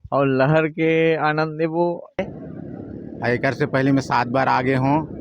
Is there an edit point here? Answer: yes; 1 cut; at 2.2 s

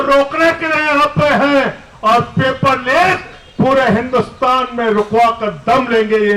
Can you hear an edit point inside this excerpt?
no; 0 cuts

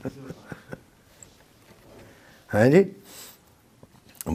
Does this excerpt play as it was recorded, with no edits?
yes; 0 cuts

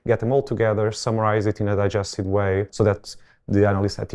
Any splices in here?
yes; 1 cut; at 2.7 s

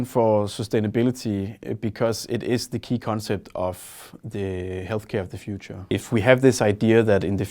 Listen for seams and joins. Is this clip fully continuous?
no; 1 cut; at 5.9 s

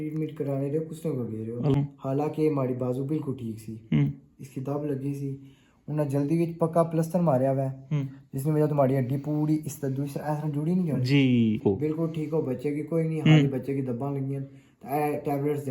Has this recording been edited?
yes; 2 cuts; at 1.7 s, 11.6 s

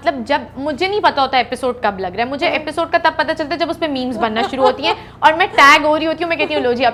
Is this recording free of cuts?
yes; 0 cuts

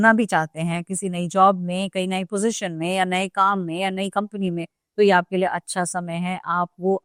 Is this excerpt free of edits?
yes; 0 cuts

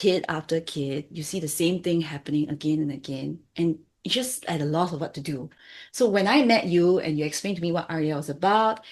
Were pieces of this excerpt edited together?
no; 0 cuts

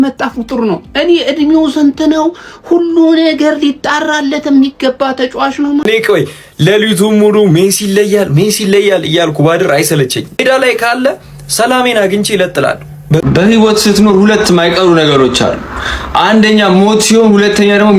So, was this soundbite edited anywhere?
yes; 3 cuts; at 5.9 s, 10.4 s, 13.2 s

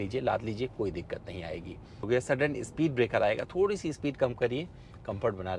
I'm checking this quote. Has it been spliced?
yes; 1 cut; at 2.0 s

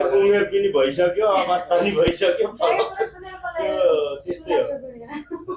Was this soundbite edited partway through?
no; 0 cuts

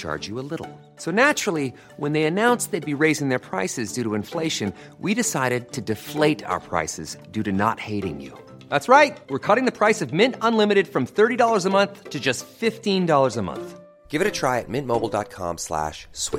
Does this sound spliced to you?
no; 0 cuts

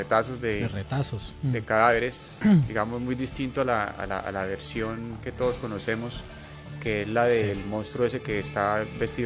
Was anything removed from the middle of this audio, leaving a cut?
no; 0 cuts

